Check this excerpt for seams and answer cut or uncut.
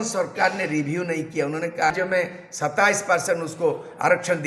cut